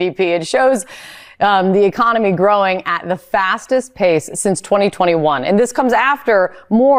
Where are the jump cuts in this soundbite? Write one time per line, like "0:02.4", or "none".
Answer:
none